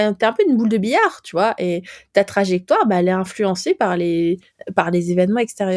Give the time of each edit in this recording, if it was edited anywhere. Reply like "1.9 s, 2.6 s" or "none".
4.5 s